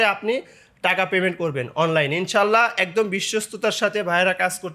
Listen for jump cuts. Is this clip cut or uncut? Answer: uncut